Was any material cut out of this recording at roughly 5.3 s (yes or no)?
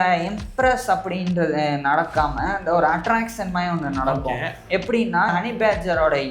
yes